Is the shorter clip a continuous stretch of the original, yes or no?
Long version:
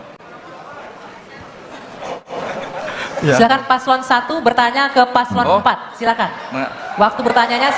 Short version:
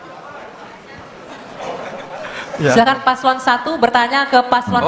no